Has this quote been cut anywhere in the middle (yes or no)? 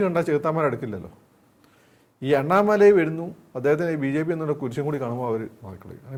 no